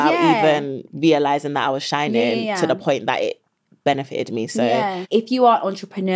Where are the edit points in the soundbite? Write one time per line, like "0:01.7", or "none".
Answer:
0:05.0